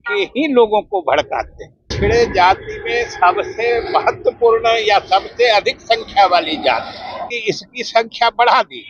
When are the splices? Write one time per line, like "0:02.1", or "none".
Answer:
0:01.9
0:07.3